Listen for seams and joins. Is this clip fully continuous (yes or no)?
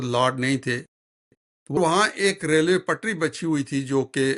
no